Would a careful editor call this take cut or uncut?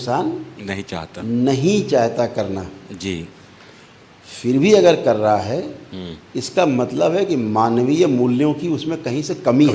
uncut